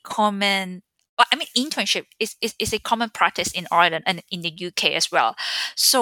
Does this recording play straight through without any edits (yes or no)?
yes